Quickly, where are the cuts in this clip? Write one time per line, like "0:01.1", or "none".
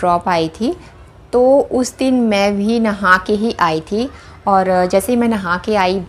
none